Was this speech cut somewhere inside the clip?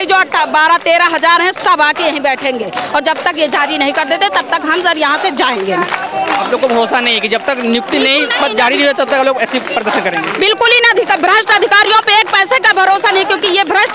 no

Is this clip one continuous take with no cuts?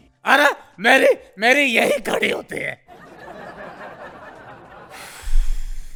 yes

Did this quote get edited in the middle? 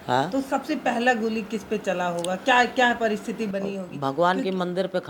no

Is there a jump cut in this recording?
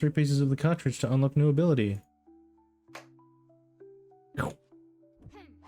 no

